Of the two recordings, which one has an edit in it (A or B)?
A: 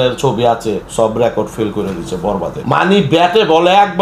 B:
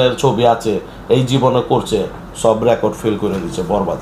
A